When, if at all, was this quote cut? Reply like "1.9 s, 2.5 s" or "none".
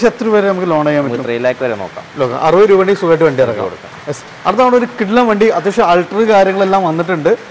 none